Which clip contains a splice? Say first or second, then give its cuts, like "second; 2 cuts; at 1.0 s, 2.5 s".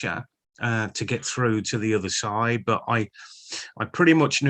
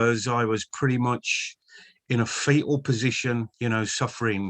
second; 1 cut; at 3.5 s